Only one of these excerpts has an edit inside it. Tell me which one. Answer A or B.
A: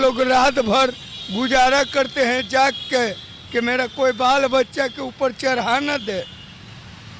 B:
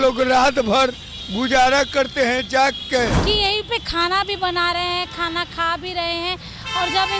B